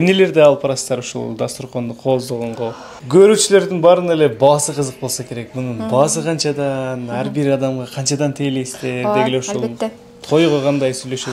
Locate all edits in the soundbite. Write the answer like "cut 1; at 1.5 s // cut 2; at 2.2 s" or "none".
cut 1; at 3.0 s

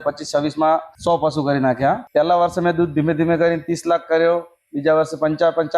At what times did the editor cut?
cut 1; at 0.9 s // cut 2; at 2.0 s

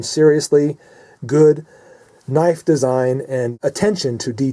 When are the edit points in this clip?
cut 1; at 3.5 s

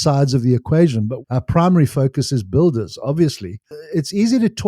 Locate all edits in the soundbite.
cut 1; at 1.2 s // cut 2; at 3.6 s

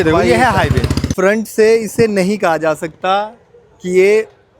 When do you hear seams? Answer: cut 1; at 1.1 s

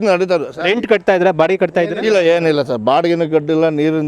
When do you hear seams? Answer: none

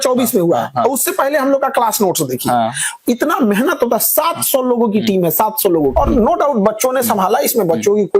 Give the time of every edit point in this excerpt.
cut 1; at 5.9 s

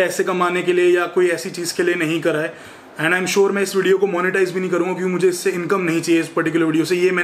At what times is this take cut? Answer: none

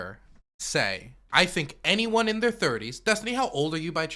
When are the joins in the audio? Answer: cut 1; at 1.1 s

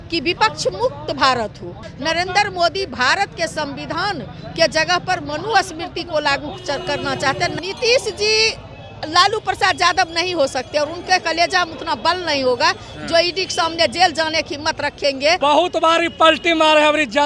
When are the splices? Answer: cut 1; at 1.9 s // cut 2; at 7.5 s // cut 3; at 15.4 s

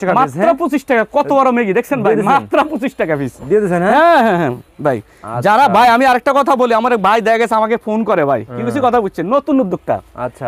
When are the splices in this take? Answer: none

